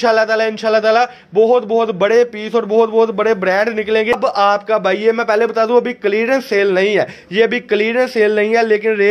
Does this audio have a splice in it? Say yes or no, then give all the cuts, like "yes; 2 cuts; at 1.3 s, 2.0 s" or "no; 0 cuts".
yes; 1 cut; at 4.1 s